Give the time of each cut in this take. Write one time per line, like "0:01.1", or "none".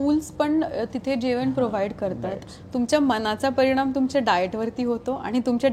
0:02.5